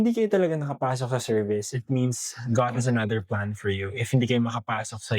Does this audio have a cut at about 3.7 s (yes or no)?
no